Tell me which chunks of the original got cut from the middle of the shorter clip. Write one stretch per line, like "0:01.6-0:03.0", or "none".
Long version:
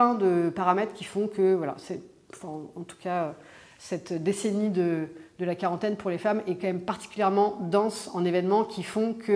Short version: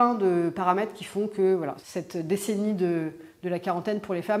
0:01.8-0:03.8